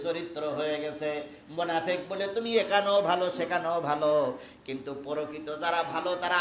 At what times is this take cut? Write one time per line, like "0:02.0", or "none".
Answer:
none